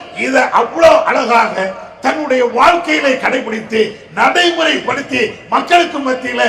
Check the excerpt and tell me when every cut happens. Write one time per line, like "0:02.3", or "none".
none

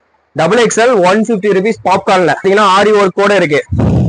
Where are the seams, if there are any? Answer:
0:02.4

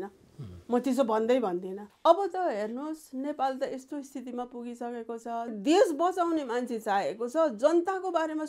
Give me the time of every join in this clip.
0:01.9
0:05.5

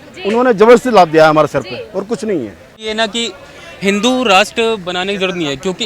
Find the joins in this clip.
0:02.8

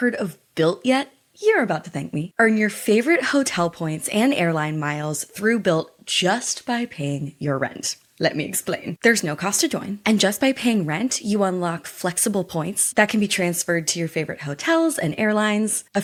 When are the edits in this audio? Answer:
none

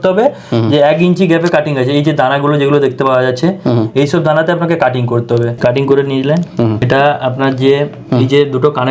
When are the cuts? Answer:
0:05.5
0:06.8

